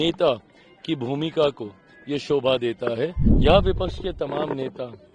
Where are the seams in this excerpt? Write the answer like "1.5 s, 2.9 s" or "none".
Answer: 3.2 s